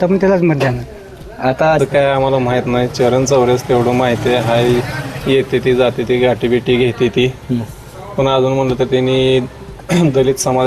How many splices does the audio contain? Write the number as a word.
one